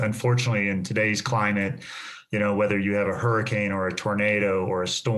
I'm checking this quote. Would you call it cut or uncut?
uncut